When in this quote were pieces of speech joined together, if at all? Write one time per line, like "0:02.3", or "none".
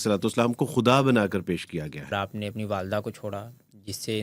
0:02.2